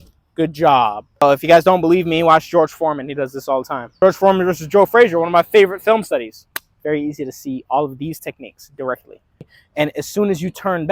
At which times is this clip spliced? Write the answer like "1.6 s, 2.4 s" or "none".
1.2 s, 4.0 s, 9.6 s